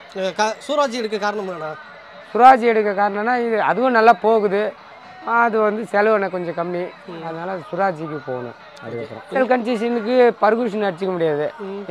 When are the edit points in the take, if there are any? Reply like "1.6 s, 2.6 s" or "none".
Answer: 9.3 s